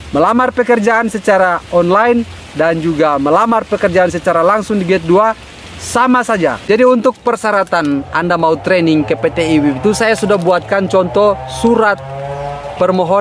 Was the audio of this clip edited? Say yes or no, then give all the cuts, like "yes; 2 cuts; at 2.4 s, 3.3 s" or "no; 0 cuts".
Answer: yes; 1 cut; at 6.6 s